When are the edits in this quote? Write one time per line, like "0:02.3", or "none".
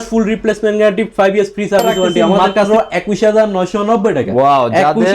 0:02.7